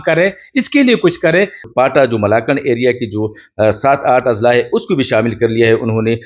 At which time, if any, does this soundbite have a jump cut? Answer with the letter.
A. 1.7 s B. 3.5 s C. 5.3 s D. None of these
A